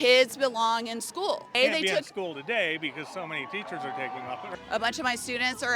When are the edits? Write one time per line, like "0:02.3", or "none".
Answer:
0:01.6
0:04.4